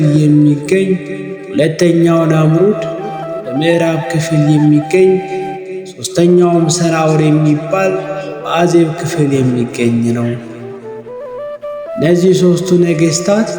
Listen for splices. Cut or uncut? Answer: cut